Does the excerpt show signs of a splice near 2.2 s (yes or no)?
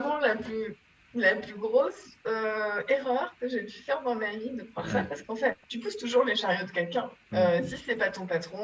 no